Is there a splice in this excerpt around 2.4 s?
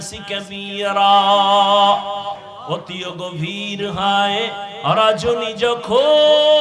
yes; 1 cut; at 2.4 s

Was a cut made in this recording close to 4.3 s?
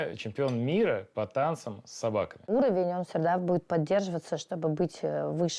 no; 1 cut; at 2.5 s

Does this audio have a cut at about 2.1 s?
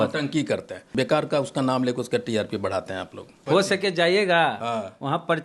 no; 2 cuts; at 0.9 s, 3.4 s

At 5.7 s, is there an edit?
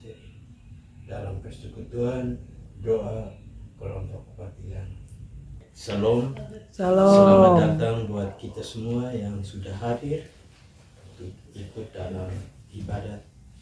yes; 1 cut; at 5.7 s

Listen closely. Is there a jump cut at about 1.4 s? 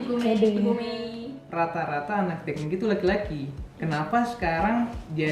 yes; 1 cut; at 1.4 s

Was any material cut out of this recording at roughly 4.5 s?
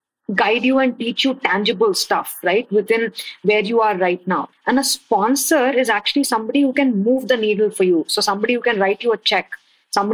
yes; 1 cut; at 4.5 s

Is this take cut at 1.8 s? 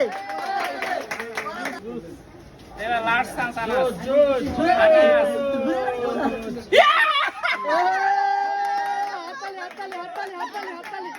yes; 1 cut; at 1.8 s

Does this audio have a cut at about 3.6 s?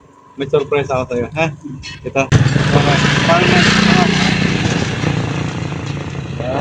no; 1 cut; at 2.3 s

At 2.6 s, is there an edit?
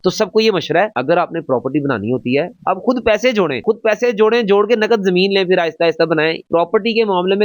yes; 2 cuts; at 2.6 s, 6.4 s

